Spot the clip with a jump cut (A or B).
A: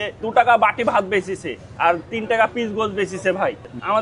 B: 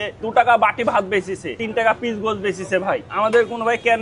B